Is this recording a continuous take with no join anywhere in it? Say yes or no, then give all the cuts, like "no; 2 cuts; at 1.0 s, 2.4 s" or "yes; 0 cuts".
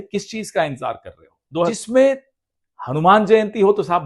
no; 1 cut; at 1.7 s